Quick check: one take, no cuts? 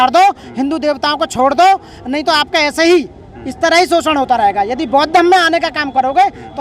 yes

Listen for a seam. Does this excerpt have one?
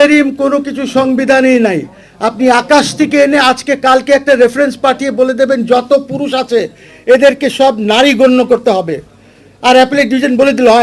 no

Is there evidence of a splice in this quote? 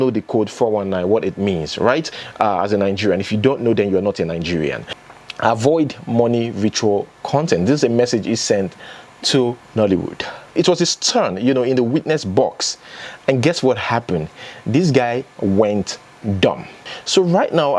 yes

